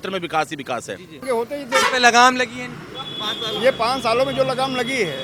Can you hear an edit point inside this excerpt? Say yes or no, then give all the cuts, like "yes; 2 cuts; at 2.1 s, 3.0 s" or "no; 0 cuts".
yes; 1 cut; at 1.2 s